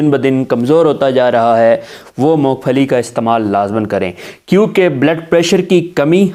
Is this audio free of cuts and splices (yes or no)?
yes